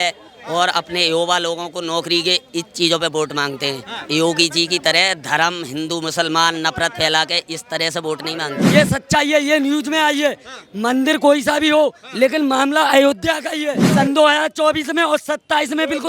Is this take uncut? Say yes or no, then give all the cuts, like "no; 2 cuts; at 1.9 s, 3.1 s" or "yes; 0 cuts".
no; 2 cuts; at 8.6 s, 13.8 s